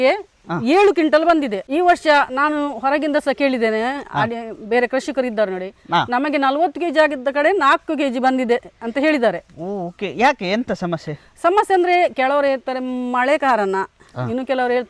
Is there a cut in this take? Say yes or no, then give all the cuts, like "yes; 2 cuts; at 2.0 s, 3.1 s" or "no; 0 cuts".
yes; 1 cut; at 1.6 s